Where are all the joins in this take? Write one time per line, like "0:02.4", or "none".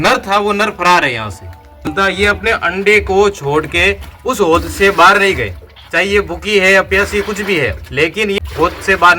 0:01.9